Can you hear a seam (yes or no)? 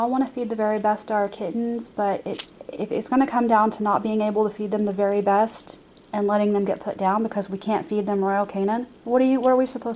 no